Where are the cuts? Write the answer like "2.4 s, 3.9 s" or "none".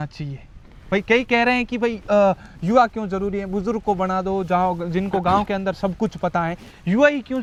none